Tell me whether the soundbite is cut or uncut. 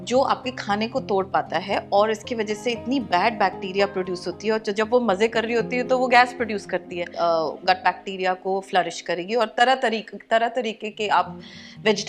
cut